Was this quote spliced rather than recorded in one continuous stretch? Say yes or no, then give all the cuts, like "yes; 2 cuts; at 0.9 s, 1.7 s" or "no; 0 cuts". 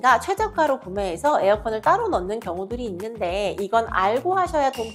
no; 0 cuts